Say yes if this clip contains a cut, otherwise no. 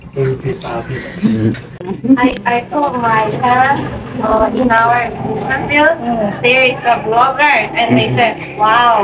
yes